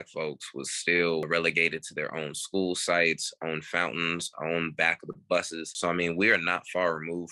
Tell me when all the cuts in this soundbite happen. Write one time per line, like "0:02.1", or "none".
0:01.3
0:05.6

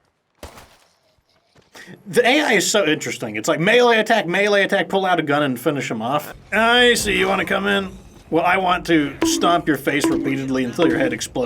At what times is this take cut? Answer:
0:06.4

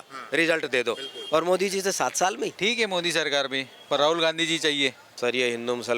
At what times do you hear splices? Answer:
0:02.5
0:05.1

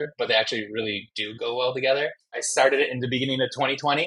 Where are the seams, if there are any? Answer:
0:02.3

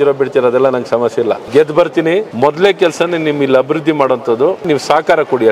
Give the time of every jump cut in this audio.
0:01.4
0:02.3
0:04.7

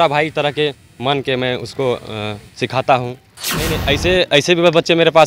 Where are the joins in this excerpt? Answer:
0:03.7

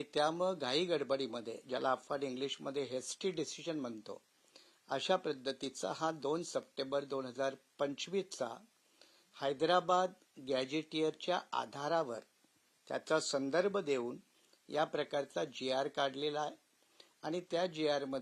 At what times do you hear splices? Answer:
none

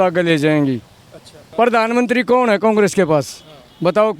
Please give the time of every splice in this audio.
0:01.5

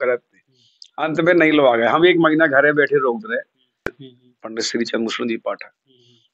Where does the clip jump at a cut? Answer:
0:04.0

